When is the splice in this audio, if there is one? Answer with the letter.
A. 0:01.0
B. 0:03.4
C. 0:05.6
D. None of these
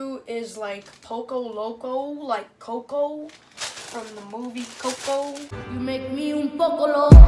C